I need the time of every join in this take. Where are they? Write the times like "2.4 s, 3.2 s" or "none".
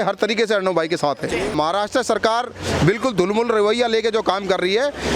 1.5 s